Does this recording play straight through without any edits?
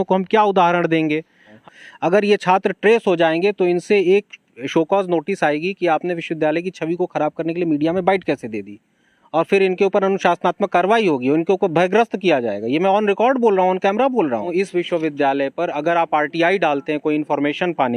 no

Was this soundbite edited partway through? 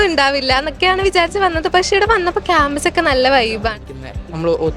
yes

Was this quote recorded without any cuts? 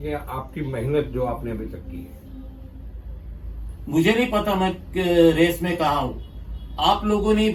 yes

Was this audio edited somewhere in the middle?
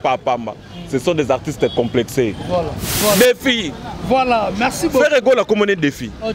yes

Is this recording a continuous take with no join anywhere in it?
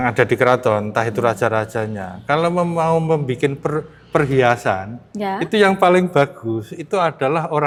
yes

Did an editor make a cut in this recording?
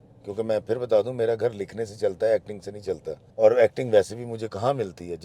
yes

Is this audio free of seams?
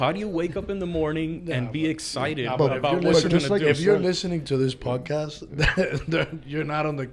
yes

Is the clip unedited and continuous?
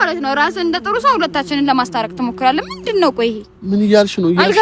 yes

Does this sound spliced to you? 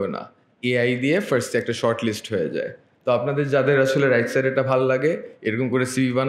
no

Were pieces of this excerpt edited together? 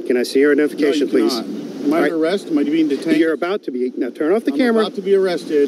no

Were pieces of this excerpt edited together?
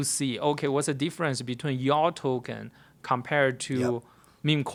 no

